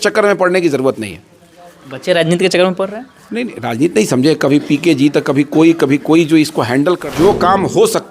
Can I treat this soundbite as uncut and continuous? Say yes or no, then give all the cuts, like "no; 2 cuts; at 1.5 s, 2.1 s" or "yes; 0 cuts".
no; 1 cut; at 7.0 s